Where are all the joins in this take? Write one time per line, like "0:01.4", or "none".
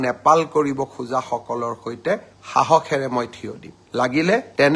none